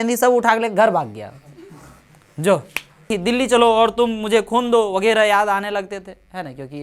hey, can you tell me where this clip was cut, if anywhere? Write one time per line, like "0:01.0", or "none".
0:03.1